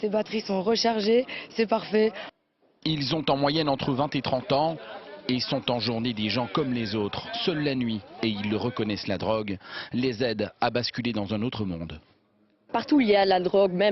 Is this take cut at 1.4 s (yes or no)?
yes